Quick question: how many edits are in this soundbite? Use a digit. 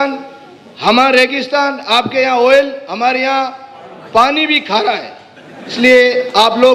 1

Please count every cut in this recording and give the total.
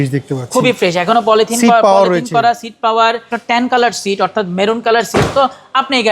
1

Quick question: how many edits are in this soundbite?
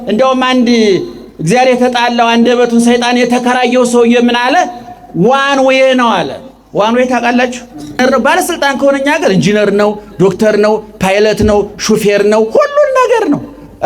1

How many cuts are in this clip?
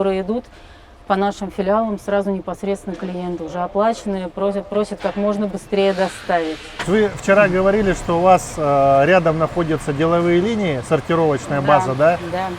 0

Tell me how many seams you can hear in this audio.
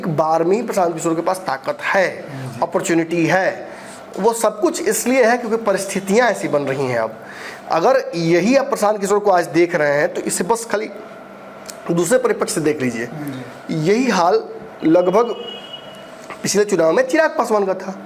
0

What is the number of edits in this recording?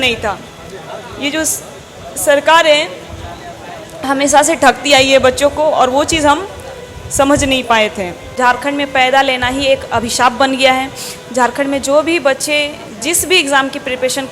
1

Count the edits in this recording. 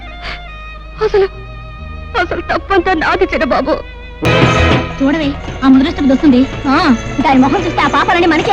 1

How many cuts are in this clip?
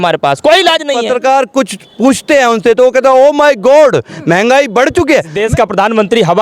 2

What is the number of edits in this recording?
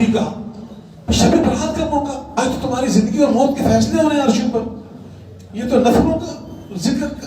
1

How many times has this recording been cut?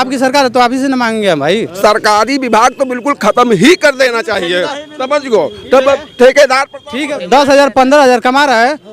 2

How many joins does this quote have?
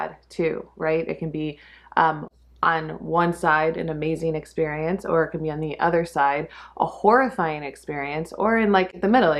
0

